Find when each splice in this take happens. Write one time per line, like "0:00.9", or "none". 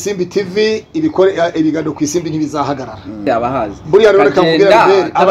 0:03.2